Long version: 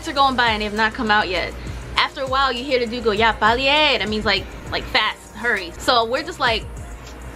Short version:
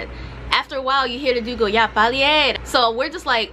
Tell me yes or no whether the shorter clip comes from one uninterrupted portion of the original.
no